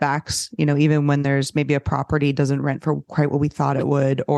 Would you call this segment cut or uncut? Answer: uncut